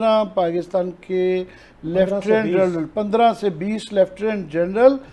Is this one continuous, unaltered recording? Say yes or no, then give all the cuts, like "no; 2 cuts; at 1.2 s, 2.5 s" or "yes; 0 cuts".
yes; 0 cuts